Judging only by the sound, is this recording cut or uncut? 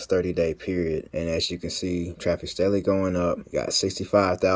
cut